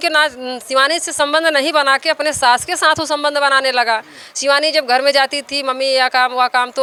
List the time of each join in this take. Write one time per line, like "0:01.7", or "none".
none